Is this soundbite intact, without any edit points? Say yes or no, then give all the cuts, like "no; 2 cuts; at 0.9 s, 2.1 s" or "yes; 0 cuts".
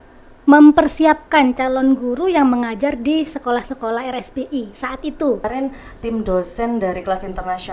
no; 1 cut; at 5.5 s